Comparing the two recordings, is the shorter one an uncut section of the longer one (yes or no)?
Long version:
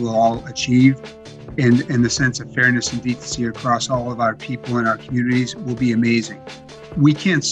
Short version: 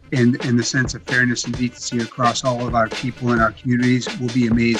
yes